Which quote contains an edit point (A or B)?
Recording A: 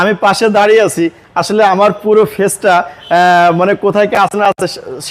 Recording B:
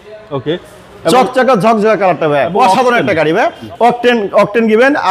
B